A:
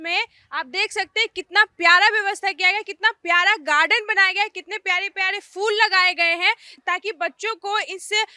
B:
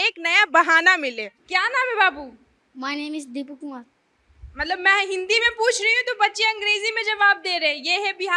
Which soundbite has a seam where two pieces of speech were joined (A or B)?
B